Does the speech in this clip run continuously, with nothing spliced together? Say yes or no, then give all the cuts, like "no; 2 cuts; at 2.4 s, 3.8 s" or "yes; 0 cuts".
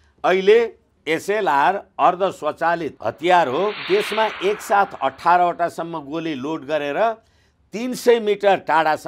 no; 3 cuts; at 1.0 s, 2.9 s, 3.8 s